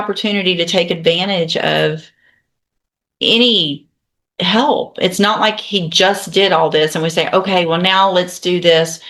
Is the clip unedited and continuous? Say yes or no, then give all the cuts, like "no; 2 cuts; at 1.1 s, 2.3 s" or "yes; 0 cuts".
yes; 0 cuts